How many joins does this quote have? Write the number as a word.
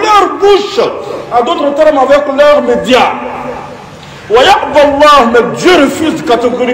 zero